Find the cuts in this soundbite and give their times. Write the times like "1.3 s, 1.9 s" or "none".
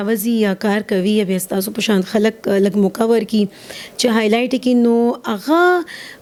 none